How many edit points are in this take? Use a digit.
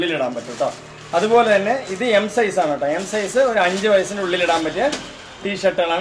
0